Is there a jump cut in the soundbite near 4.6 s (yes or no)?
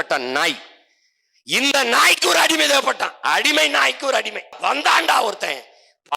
yes